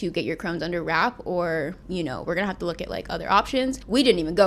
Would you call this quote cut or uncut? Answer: uncut